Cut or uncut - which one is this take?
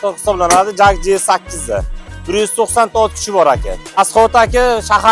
cut